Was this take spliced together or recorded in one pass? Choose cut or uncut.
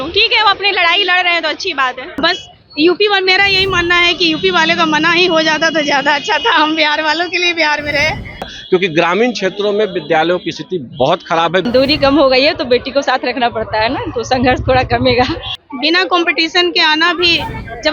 cut